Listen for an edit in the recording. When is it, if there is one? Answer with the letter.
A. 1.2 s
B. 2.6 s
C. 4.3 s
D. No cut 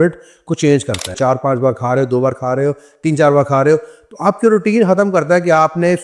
A